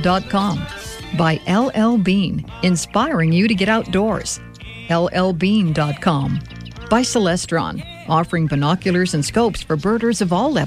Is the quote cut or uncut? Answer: uncut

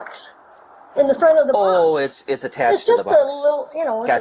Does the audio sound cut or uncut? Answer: uncut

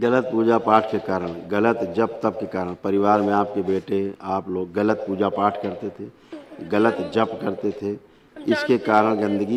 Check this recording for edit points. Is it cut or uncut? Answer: uncut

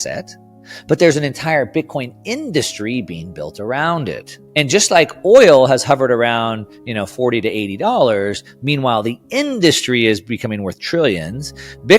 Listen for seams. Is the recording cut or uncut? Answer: cut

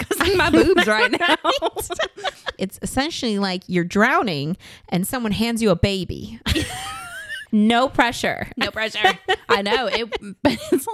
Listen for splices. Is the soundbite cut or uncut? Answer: cut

